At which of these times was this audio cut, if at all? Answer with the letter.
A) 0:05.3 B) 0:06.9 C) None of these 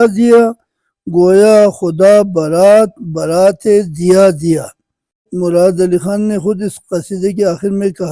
A